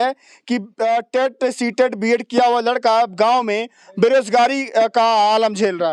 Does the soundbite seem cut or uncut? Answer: uncut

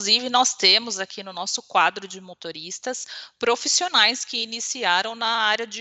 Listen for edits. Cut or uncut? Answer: uncut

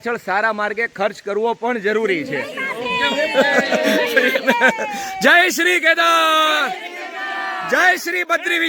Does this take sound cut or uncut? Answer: uncut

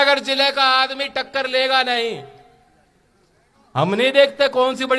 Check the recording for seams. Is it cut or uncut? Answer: uncut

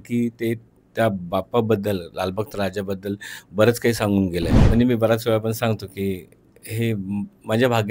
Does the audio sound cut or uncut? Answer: cut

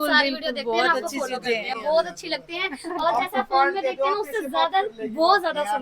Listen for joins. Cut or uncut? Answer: uncut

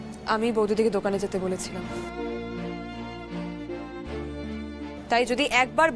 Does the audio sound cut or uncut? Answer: uncut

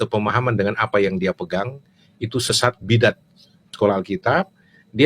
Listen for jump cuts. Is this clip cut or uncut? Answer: cut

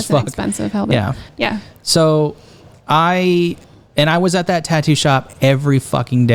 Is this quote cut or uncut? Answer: cut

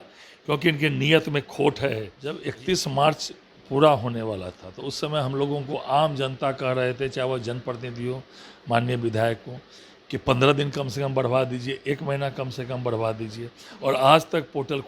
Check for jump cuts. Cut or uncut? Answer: cut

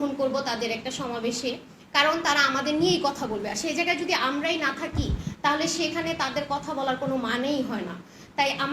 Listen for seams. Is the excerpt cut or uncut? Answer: uncut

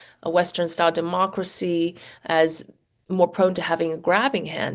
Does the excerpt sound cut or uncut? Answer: uncut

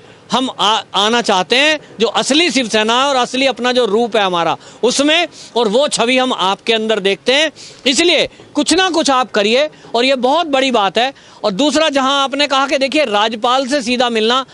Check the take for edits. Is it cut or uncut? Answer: uncut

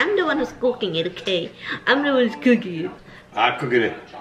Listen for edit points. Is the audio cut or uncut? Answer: cut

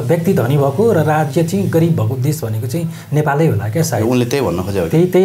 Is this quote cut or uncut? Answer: uncut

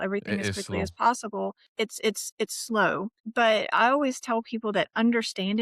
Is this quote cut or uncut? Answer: cut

